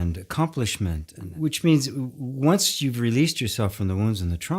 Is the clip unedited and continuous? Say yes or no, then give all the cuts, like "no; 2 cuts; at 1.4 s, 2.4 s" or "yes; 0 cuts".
no; 1 cut; at 1.1 s